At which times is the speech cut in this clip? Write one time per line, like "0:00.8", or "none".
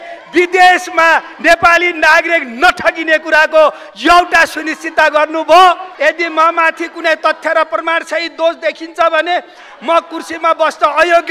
0:05.9